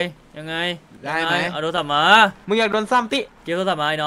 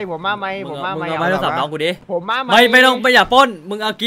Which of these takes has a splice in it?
second; 1 cut; at 2.0 s

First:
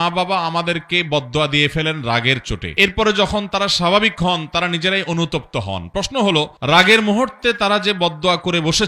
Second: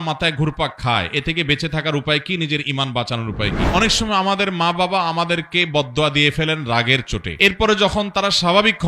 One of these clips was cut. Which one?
second; 1 cut; at 3.6 s

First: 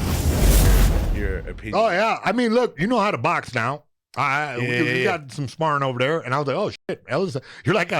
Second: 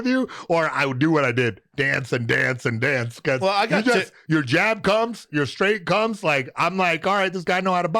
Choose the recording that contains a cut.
first; 1 cut; at 1.1 s

